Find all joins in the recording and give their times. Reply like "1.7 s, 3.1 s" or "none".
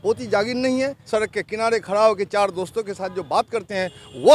1.0 s